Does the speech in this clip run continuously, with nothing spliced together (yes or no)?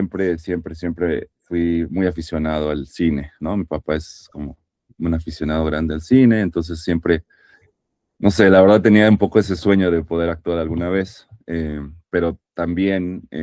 yes